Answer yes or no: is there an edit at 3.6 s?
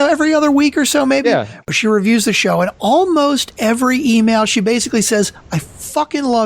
no